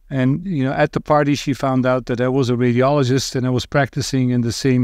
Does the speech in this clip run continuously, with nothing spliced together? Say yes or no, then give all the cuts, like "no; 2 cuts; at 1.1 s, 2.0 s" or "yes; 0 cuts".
yes; 0 cuts